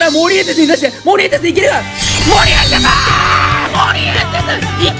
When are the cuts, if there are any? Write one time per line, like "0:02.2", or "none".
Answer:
none